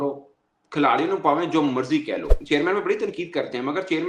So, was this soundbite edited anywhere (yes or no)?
yes